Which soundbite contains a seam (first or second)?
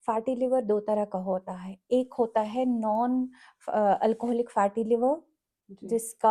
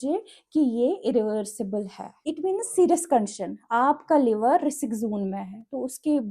second